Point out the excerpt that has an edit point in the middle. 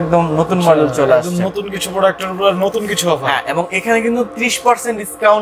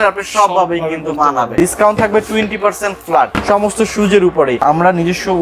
second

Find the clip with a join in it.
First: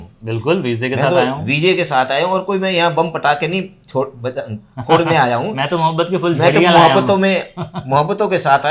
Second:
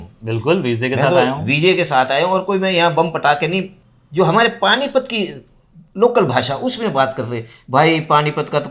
second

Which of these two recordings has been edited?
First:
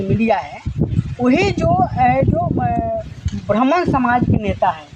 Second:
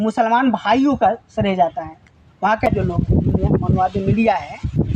second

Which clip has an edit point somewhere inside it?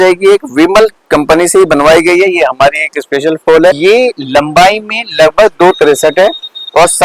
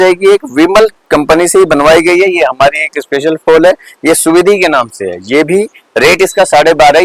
first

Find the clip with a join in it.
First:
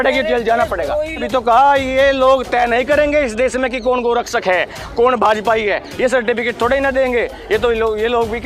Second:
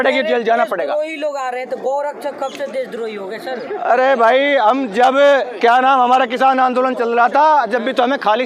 first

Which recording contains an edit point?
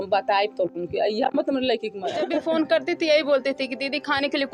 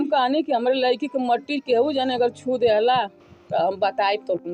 first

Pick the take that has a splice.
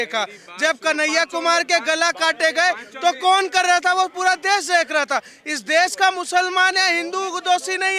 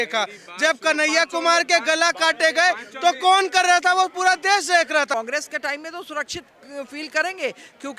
second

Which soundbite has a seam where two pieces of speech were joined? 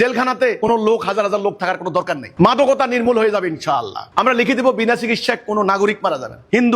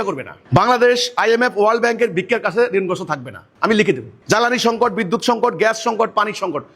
first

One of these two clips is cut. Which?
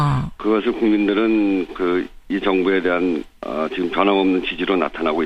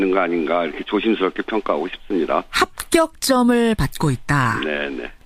first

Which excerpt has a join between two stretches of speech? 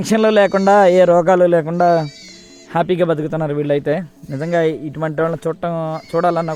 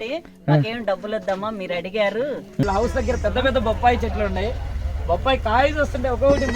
second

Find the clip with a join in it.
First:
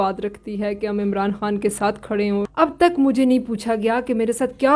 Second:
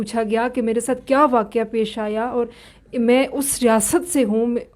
first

